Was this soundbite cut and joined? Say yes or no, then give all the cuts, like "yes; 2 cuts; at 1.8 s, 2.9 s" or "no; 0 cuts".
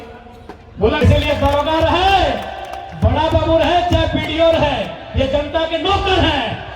yes; 1 cut; at 1.0 s